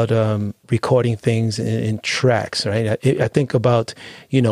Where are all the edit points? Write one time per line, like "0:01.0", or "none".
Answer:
none